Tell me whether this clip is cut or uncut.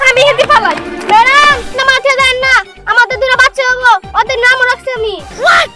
uncut